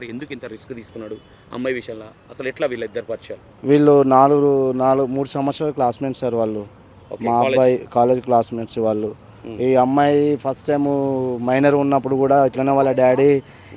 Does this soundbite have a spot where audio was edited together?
no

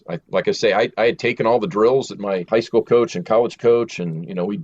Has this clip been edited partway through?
yes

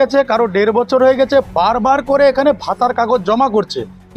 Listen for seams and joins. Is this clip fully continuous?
yes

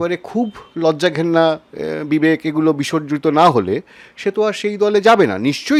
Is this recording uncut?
yes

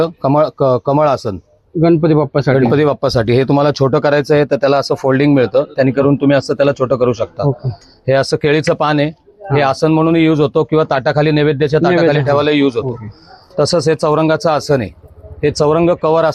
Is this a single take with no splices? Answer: yes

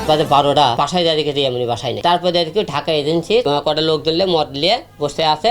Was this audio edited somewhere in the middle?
yes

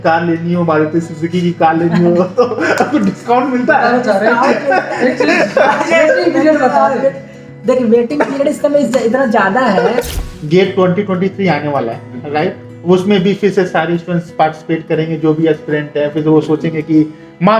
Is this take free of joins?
no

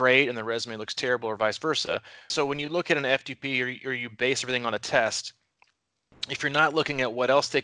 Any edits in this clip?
yes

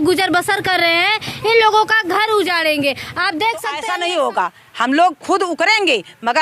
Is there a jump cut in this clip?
yes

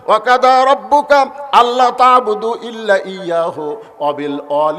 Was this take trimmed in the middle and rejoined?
no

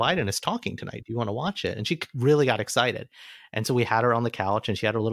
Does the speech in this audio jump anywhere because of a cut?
no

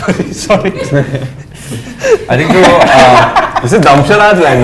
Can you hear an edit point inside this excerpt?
no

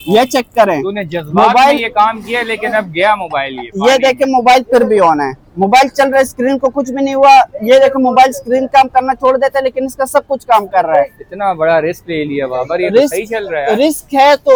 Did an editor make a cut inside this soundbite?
no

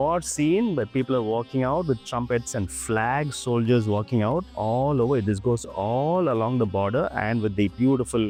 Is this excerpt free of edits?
yes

